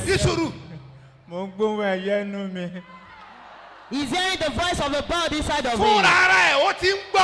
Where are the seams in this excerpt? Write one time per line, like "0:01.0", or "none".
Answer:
none